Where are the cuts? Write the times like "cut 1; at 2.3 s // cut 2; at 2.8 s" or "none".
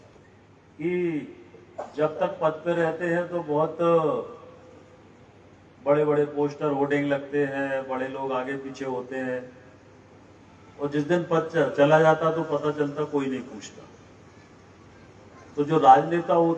none